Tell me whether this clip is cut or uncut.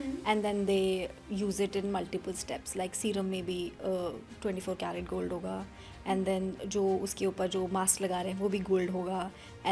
uncut